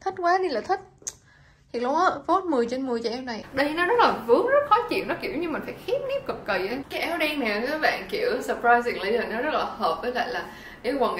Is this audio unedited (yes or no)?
no